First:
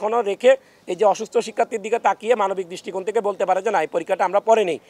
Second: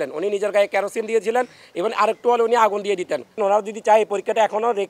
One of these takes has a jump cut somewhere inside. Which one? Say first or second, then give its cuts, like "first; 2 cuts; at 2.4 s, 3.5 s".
second; 1 cut; at 3.4 s